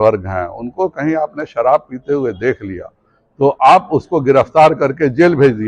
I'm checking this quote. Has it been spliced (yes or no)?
no